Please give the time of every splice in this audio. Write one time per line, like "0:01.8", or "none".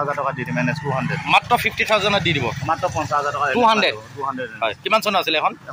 none